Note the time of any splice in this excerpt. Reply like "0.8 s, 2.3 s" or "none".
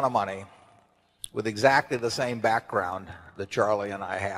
none